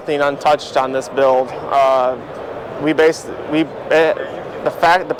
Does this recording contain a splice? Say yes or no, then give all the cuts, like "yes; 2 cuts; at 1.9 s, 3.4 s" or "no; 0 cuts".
no; 0 cuts